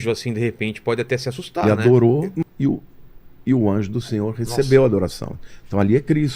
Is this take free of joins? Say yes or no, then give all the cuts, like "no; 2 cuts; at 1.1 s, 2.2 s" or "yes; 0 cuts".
no; 1 cut; at 1.6 s